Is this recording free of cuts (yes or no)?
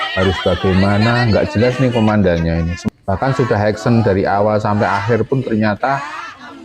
no